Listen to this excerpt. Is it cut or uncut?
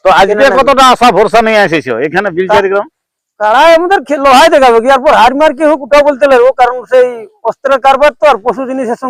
uncut